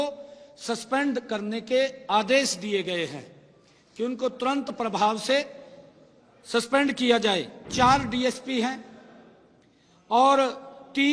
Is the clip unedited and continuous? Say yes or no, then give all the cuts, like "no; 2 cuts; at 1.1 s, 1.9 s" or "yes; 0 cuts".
no; 1 cut; at 7.6 s